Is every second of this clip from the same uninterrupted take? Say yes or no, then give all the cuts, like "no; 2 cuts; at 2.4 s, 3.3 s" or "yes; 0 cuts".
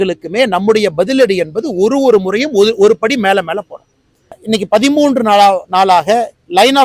no; 1 cut; at 4.4 s